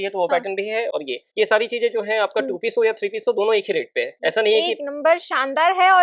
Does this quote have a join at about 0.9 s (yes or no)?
no